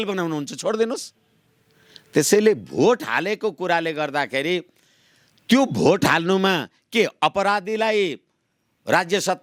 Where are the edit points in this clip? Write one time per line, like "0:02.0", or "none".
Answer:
none